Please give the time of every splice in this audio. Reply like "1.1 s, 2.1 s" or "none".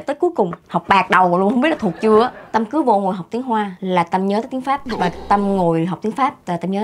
2.4 s, 3.8 s, 4.9 s